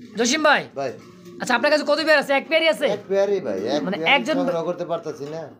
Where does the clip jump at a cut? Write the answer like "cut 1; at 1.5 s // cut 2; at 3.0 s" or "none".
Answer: none